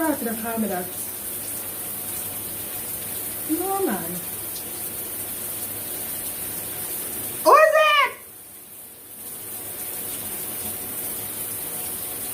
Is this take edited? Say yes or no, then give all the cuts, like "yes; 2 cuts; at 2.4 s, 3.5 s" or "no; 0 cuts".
no; 0 cuts